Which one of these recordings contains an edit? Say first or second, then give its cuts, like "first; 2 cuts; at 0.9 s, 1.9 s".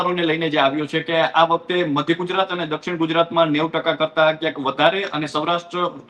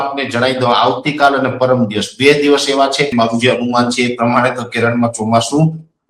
second; 1 cut; at 3.1 s